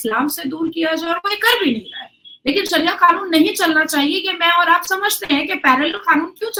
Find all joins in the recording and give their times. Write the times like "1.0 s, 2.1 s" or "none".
none

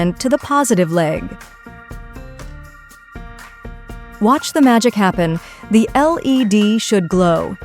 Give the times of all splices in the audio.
1.6 s, 3.9 s

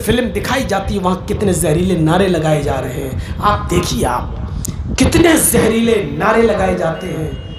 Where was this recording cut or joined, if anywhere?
none

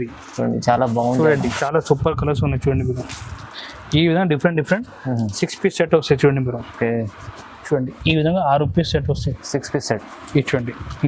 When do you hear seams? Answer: 1.6 s

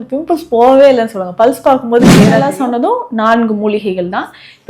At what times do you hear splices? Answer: 2.4 s

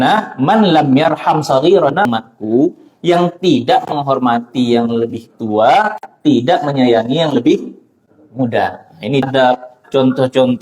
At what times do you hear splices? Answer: 2.0 s, 9.2 s

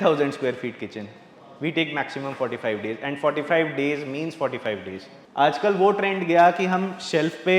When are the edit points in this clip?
5.1 s

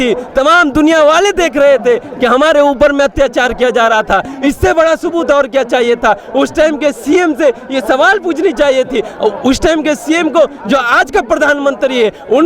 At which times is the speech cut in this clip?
none

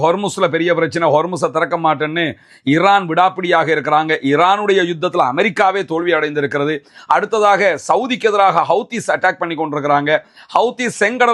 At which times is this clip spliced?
none

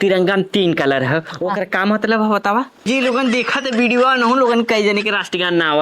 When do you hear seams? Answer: 2.8 s

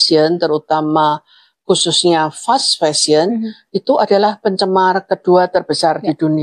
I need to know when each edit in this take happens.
none

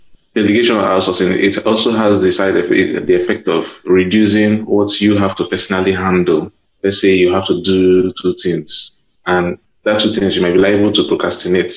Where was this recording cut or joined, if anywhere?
6.6 s, 9.3 s

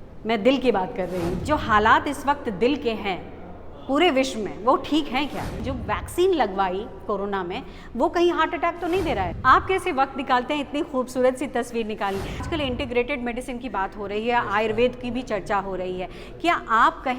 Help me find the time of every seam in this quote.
1.4 s, 5.6 s, 9.3 s, 12.5 s

